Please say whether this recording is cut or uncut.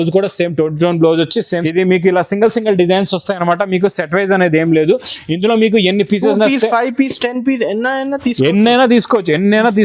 cut